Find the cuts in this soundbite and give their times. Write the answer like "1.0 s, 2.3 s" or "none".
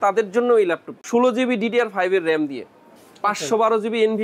0.9 s